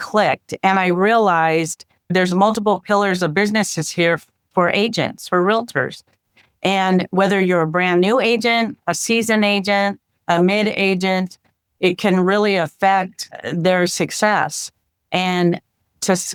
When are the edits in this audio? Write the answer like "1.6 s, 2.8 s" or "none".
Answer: none